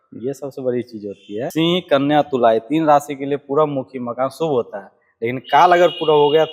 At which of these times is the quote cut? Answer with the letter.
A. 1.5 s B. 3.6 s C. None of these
A